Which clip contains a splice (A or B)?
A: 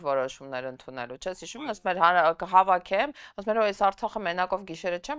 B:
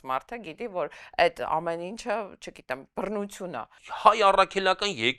B